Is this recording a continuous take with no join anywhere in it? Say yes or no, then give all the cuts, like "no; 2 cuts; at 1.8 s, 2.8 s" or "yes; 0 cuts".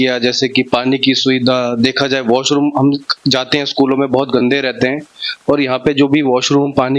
yes; 0 cuts